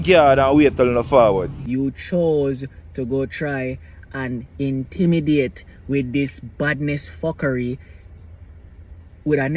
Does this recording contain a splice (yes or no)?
yes